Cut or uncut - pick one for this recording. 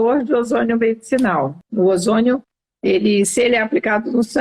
cut